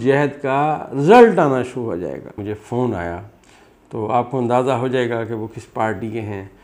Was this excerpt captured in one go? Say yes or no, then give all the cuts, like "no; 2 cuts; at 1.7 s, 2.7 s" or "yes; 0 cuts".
no; 1 cut; at 2.2 s